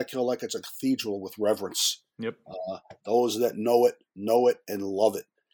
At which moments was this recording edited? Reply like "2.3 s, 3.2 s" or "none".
none